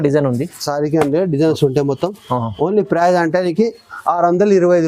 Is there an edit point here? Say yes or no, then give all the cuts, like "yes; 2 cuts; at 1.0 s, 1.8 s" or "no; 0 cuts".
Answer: no; 0 cuts